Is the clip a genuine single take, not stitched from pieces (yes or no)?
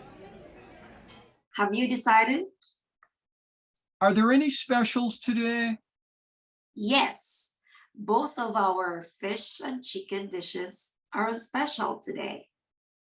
no